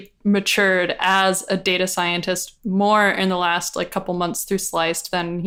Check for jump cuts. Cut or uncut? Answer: uncut